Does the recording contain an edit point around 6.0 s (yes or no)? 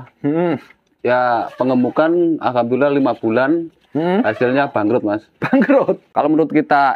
yes